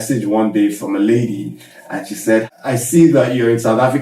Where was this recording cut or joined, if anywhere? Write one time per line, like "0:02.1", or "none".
0:02.5

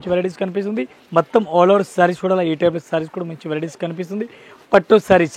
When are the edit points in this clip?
0:01.0

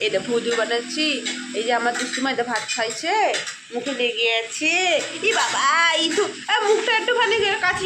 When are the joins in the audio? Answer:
none

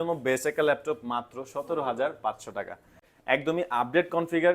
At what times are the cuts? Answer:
0:03.1

